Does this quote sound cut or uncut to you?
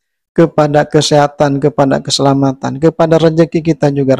uncut